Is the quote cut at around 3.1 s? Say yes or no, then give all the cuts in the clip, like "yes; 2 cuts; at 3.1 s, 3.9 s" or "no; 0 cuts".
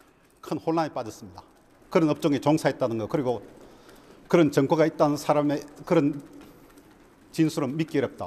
yes; 1 cut; at 3.1 s